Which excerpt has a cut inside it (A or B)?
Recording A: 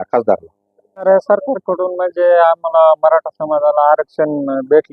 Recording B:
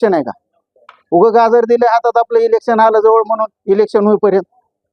A